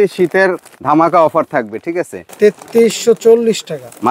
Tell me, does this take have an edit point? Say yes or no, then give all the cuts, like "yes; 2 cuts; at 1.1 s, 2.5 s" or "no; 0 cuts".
yes; 1 cut; at 2.2 s